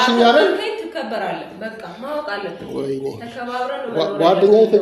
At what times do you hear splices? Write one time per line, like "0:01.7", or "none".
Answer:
none